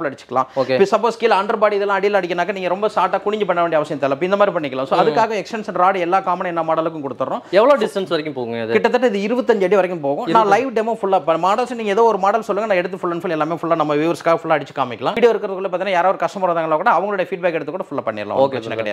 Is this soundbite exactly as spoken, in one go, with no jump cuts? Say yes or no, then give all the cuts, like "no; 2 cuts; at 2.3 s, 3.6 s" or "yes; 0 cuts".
yes; 0 cuts